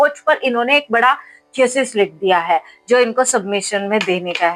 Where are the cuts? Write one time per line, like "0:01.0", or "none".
none